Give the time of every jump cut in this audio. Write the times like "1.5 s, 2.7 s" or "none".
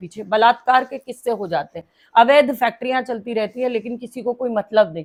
none